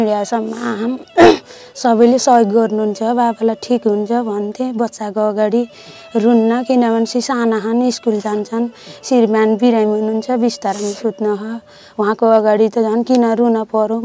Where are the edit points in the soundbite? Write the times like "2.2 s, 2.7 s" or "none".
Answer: none